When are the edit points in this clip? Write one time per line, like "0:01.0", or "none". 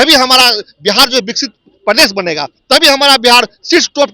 none